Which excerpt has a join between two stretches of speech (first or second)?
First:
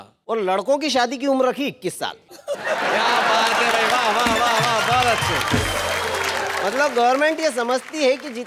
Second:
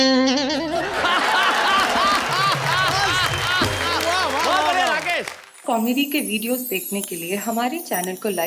second